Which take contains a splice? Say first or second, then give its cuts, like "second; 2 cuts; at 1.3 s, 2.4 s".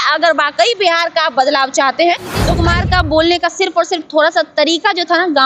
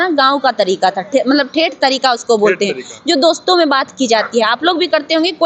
first; 1 cut; at 2.5 s